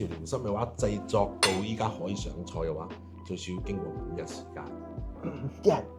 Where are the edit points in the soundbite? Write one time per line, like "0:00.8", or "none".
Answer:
none